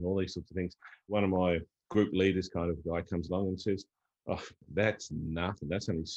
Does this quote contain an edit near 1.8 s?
yes; 3 cuts; at 1.1 s, 1.8 s, 4.6 s

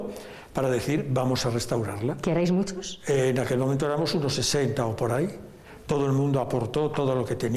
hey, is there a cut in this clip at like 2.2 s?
no; 0 cuts

